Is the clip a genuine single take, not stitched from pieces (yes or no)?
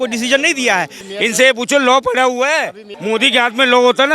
no